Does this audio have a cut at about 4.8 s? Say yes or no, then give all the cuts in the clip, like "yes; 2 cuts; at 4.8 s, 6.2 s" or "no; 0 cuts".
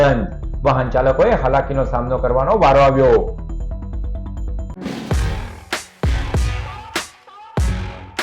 yes; 1 cut; at 4.8 s